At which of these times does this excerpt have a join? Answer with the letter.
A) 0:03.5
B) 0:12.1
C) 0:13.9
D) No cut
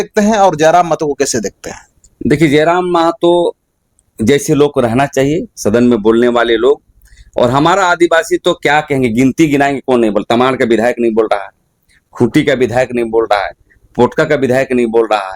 D